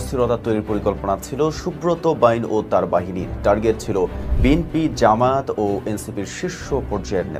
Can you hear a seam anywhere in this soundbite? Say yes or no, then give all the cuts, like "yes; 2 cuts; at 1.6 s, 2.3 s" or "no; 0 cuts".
no; 0 cuts